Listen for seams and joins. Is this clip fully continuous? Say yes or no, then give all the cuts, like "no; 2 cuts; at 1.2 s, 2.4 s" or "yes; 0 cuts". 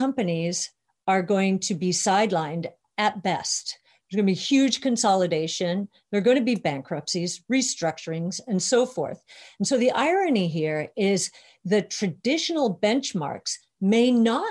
yes; 0 cuts